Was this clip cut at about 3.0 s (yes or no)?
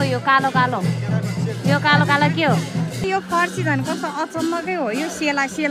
yes